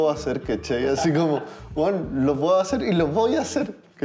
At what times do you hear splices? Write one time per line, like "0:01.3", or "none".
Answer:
none